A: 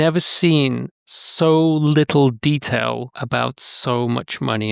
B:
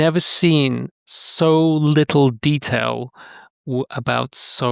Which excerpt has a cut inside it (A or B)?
A